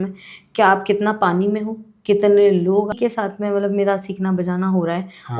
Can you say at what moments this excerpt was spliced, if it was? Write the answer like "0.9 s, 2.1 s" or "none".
3.0 s